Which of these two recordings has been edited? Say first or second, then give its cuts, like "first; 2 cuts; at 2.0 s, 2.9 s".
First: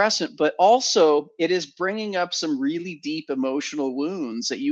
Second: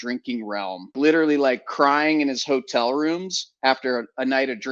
second; 1 cut; at 0.9 s